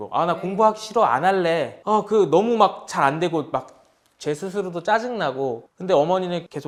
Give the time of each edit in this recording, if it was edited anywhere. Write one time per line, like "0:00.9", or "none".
none